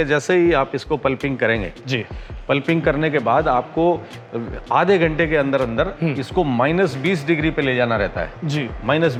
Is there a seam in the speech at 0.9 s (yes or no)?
no